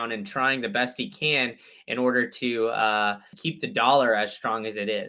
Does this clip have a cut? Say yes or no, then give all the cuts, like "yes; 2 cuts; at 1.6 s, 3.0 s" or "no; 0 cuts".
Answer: yes; 1 cut; at 3.4 s